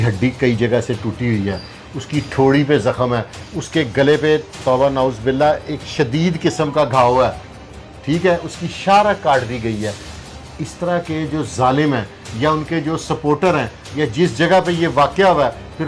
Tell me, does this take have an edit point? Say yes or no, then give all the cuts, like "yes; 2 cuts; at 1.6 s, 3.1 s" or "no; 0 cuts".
no; 0 cuts